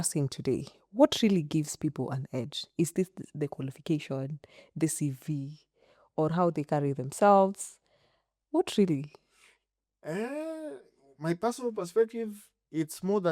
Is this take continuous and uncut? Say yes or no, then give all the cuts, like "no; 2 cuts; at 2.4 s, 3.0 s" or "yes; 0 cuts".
yes; 0 cuts